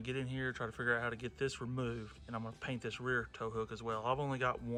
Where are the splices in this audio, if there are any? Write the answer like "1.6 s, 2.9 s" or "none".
none